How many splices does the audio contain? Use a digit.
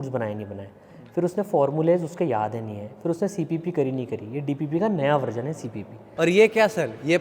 1